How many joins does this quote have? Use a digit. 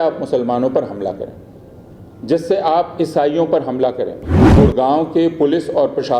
1